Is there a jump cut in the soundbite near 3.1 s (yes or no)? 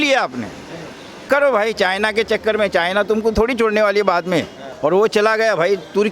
no